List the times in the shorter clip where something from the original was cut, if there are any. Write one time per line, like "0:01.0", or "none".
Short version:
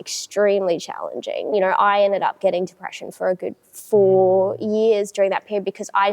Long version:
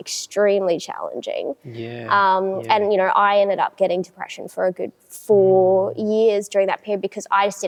0:01.5